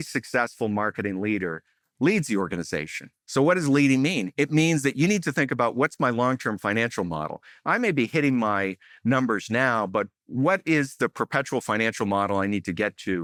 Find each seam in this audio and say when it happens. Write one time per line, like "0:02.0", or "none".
none